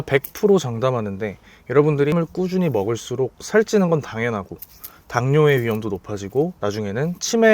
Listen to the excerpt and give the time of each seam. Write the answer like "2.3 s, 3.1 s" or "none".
2.1 s